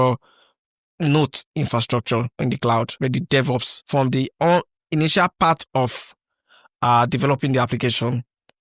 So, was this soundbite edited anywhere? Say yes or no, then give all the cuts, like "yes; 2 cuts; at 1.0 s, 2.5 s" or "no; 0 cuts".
yes; 2 cuts; at 2.3 s, 3.5 s